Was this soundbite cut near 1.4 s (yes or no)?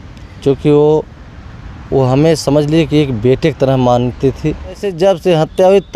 no